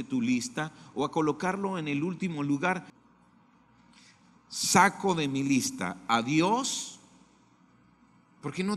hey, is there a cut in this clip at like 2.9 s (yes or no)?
yes